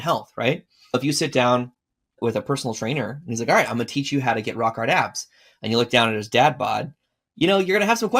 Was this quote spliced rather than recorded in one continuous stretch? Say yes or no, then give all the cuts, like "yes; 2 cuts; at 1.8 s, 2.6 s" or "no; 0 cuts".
yes; 2 cuts; at 0.9 s, 2.2 s